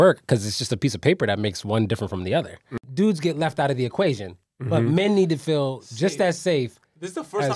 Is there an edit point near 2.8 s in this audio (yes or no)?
yes